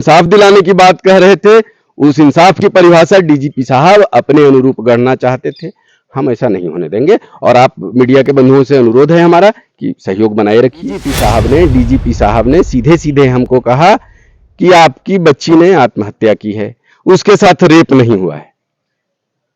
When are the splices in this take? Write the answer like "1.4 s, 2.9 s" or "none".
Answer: 11.1 s